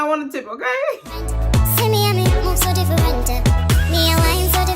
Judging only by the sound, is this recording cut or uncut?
cut